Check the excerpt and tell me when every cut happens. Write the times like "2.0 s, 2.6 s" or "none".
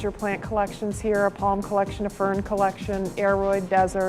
none